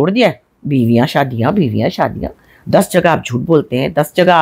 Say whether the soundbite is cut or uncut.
uncut